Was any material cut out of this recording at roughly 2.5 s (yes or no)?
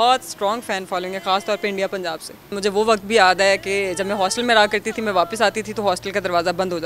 yes